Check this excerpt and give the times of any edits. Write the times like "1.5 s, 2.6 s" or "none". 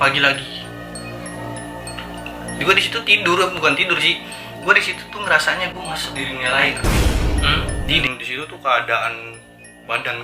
8.0 s